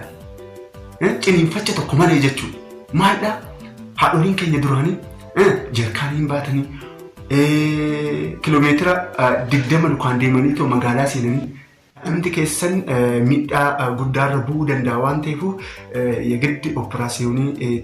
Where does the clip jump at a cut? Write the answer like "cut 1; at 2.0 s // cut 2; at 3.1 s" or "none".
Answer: cut 1; at 12.0 s